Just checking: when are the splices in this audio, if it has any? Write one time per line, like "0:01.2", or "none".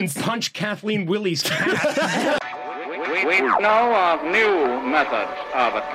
0:02.4